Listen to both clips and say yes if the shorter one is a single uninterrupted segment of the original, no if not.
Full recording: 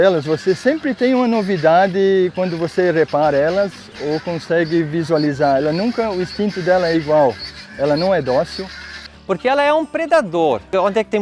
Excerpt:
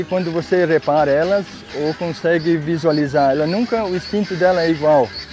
yes